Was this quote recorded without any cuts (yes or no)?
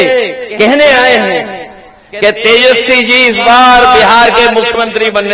yes